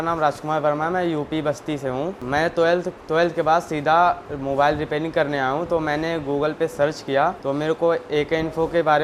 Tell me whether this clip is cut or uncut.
uncut